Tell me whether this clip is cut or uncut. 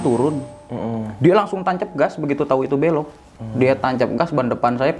uncut